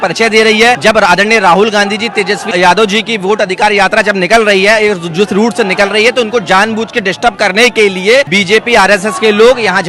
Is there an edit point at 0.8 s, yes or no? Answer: yes